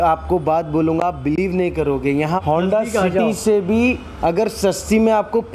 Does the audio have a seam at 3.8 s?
no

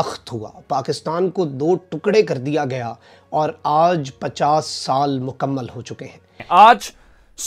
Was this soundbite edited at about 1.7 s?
no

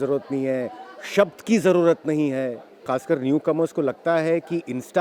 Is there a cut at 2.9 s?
yes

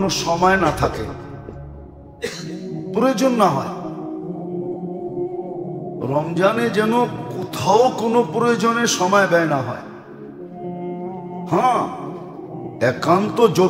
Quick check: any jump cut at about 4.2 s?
no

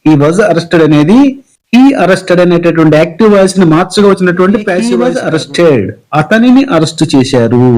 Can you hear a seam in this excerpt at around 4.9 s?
yes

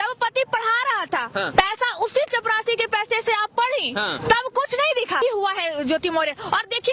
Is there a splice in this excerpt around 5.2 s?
yes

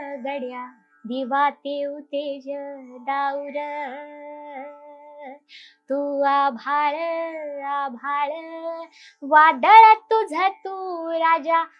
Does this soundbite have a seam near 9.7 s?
no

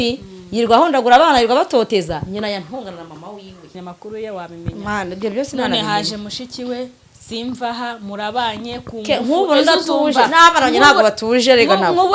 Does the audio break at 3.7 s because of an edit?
yes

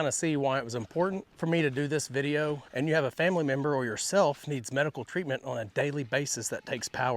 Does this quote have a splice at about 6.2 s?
no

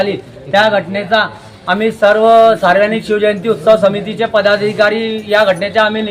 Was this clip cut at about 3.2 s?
no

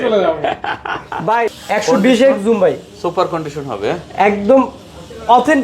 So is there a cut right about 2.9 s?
no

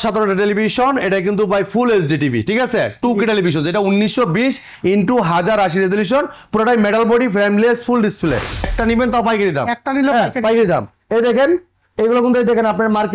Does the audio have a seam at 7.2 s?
no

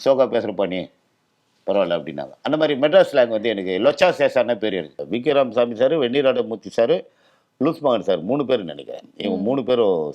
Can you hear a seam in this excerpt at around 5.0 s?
yes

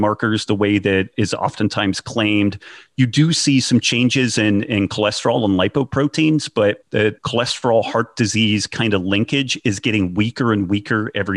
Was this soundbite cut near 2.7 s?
no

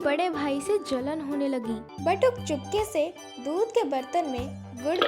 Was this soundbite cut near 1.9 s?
yes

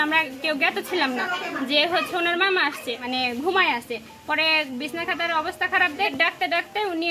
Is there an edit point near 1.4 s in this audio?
no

